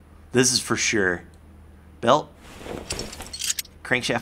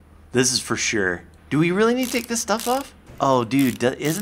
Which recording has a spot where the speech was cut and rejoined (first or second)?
second